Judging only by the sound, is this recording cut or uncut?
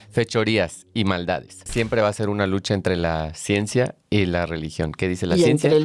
cut